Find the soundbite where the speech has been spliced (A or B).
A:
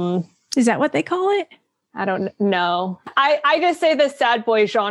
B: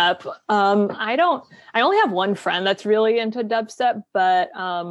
A